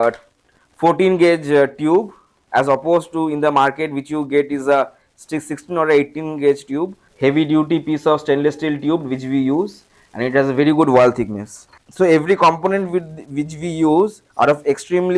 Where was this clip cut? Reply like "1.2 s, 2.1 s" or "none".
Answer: 7.0 s, 11.8 s, 14.2 s